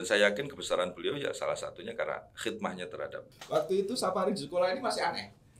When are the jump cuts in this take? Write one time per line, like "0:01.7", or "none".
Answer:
0:03.3